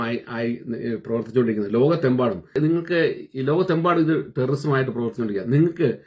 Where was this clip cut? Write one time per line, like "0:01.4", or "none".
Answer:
0:02.6